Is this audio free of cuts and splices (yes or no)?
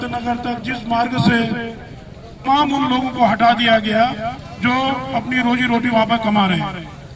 no